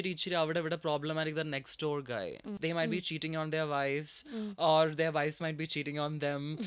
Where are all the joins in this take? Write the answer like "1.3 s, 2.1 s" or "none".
2.5 s